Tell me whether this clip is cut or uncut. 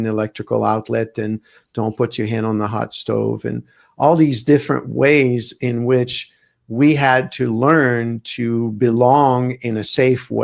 uncut